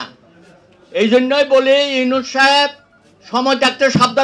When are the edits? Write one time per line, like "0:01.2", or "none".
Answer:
none